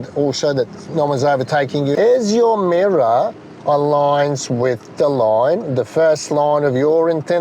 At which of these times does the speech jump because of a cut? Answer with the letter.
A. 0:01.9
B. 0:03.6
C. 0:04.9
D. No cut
A